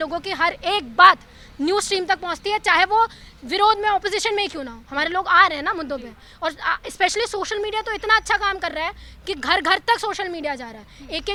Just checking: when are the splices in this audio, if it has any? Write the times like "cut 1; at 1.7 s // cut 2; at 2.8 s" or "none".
none